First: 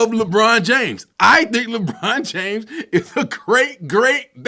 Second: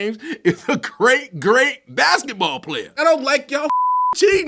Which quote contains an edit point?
second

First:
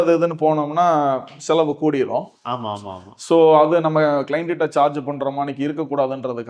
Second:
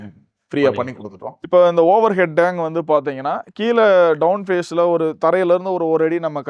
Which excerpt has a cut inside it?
second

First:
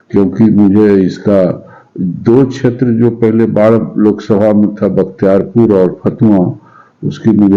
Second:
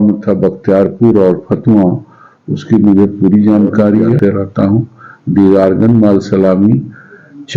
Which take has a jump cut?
second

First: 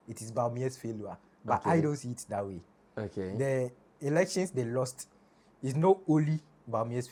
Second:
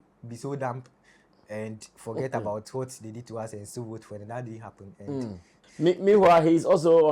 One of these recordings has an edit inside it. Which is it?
second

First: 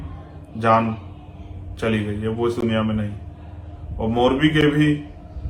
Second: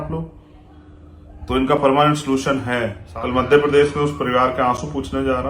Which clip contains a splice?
second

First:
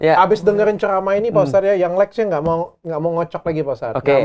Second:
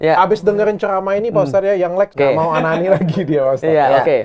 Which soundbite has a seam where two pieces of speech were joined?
second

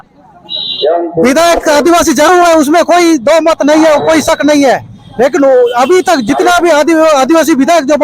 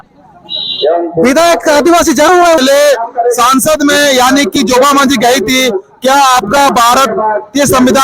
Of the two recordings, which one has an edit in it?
second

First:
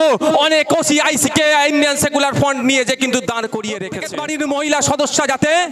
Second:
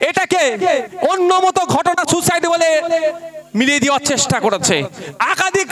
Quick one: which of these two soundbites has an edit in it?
first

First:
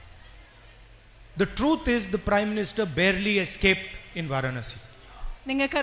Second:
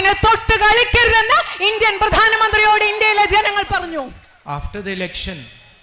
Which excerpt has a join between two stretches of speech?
second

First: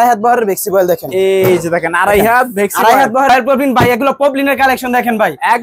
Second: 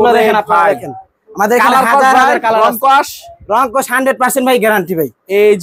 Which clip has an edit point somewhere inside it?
first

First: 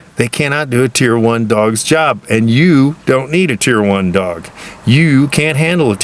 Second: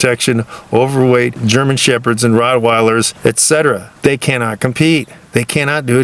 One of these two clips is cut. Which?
second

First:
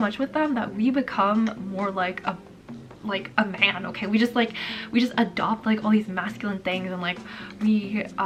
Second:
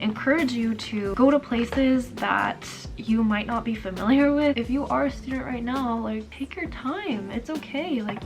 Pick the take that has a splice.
second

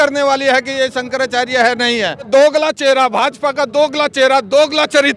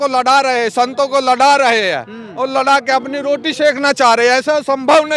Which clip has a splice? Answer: first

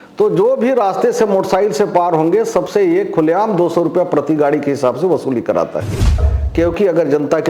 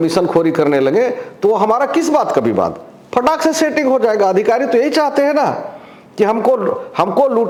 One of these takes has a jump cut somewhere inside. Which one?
first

